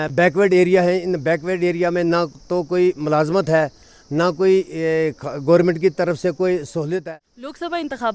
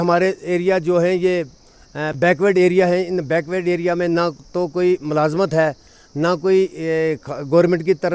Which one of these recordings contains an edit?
first; 1 cut; at 7.0 s

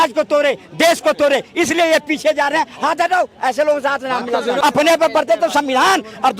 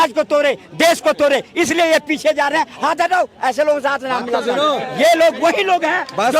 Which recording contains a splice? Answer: first; 1 cut; at 4.6 s

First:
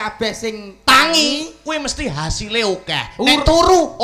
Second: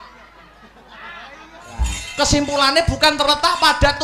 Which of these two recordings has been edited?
second; 1 cut; at 2.0 s

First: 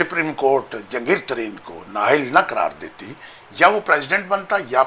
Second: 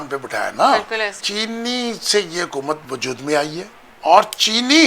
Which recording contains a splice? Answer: second; 3 cuts; at 1.1 s, 2.8 s, 3.8 s

